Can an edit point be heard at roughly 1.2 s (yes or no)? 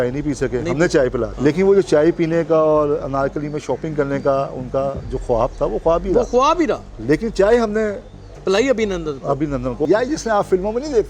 yes